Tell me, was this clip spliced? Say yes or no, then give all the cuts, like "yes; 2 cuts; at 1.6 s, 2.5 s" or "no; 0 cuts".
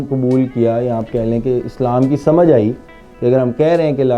no; 0 cuts